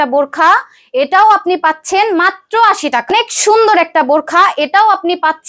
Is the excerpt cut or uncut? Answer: cut